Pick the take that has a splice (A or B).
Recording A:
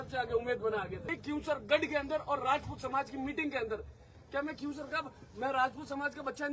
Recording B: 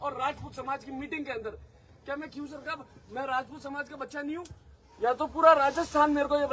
A